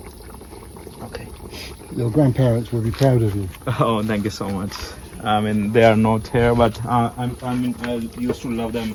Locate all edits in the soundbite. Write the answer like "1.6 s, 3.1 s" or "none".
none